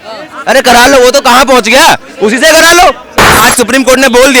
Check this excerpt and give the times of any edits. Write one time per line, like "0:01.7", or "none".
0:03.4